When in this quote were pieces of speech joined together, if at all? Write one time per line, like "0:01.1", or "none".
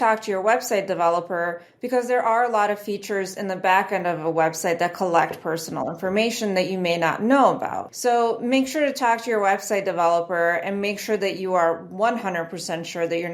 0:07.8